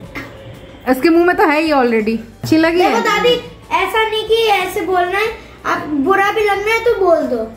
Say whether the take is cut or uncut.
cut